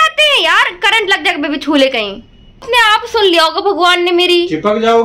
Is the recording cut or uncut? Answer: cut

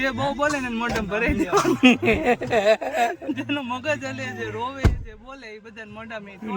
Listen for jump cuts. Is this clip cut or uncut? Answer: uncut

